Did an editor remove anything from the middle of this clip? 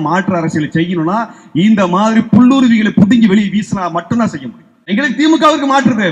yes; 1 cut; at 4.9 s

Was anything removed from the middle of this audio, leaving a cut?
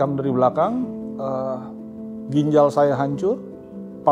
no; 0 cuts

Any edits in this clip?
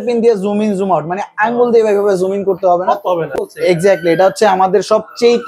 yes; 1 cut; at 3.3 s

